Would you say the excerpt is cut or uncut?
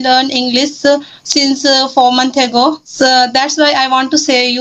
cut